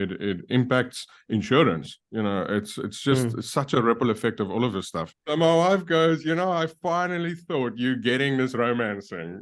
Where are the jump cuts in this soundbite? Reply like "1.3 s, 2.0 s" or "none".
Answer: 5.1 s